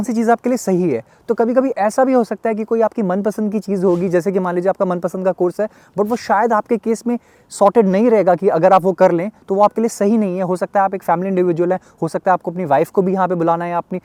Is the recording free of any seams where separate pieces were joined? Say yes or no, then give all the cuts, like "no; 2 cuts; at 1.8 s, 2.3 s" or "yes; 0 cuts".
yes; 0 cuts